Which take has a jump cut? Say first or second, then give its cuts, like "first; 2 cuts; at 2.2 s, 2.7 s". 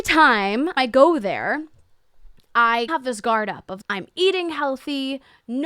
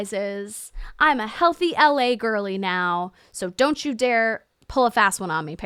first; 1 cut; at 2.9 s